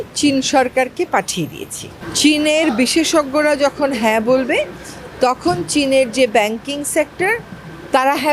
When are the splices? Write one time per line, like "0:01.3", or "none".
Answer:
0:02.0